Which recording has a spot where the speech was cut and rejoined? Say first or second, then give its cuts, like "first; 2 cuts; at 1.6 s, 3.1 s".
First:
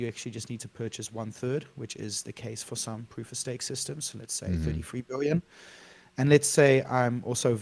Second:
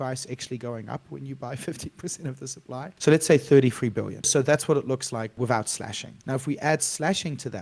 second; 4 cuts; at 2.9 s, 4.3 s, 5.3 s, 6.1 s